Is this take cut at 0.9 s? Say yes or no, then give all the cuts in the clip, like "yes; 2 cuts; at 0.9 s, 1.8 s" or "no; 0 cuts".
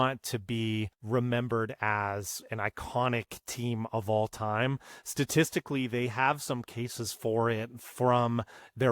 yes; 1 cut; at 0.9 s